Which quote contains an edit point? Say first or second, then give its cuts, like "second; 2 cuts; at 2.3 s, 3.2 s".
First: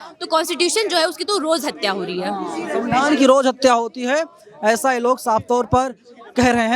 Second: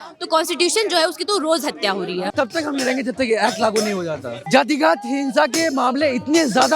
second; 2 cuts; at 2.3 s, 4.4 s